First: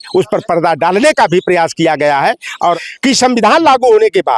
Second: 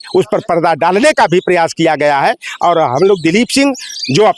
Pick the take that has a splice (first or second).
first